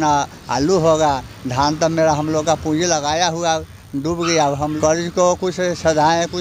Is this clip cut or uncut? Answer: cut